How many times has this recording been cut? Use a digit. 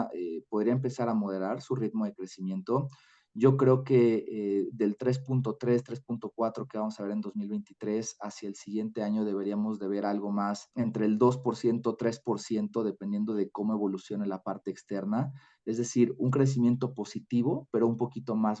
0